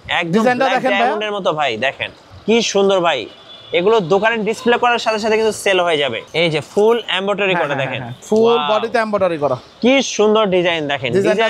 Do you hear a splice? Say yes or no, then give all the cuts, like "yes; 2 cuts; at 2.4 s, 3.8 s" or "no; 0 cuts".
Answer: yes; 1 cut; at 6.2 s